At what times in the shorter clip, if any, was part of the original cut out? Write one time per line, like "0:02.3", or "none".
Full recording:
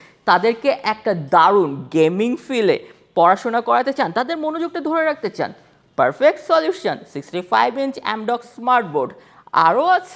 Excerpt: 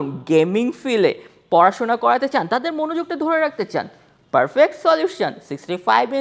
none